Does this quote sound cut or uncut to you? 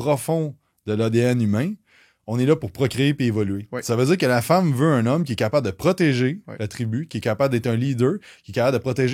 uncut